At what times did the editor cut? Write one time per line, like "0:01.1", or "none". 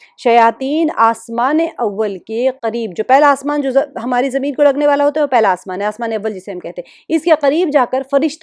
none